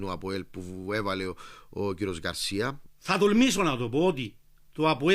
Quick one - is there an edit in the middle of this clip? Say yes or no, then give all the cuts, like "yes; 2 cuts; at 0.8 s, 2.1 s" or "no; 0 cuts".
yes; 1 cut; at 2.8 s